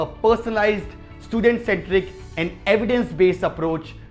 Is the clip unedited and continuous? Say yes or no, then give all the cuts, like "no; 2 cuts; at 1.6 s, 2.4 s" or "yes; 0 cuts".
yes; 0 cuts